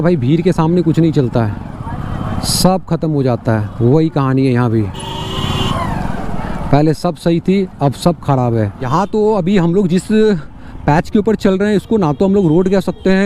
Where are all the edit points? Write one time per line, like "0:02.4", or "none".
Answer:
0:08.9